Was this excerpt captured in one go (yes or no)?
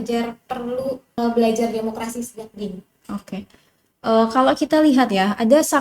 no